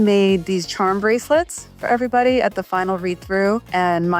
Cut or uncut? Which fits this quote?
uncut